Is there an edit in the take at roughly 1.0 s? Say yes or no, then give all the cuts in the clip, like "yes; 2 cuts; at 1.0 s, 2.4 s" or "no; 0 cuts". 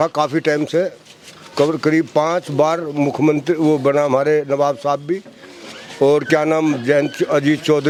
no; 0 cuts